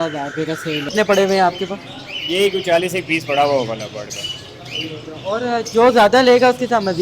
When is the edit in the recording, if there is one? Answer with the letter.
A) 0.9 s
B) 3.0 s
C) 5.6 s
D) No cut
A